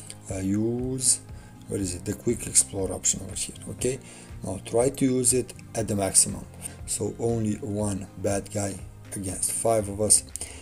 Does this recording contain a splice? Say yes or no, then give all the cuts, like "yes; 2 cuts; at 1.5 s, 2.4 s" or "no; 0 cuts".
yes; 1 cut; at 6.5 s